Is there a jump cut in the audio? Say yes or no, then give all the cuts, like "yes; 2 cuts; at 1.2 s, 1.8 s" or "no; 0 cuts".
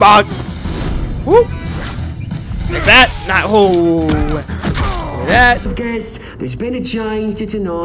yes; 1 cut; at 5.7 s